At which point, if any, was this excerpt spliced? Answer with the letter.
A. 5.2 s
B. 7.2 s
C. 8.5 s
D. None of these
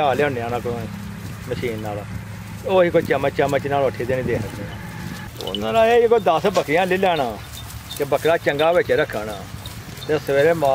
A